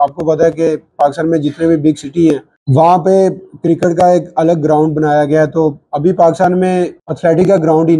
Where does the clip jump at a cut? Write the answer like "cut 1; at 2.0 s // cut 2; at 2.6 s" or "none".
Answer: cut 1; at 2.5 s // cut 2; at 7.0 s